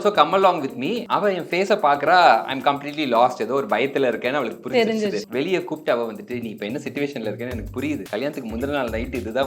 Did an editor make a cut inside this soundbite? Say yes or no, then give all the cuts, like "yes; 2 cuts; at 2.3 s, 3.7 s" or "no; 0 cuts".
yes; 3 cuts; at 1.0 s, 5.3 s, 8.0 s